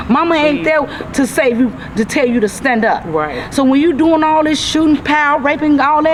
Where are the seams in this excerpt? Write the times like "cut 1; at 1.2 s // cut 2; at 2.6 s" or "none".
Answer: none